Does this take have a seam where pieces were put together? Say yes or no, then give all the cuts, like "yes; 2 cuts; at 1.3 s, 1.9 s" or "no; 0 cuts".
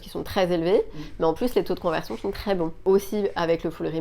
yes; 1 cut; at 2.7 s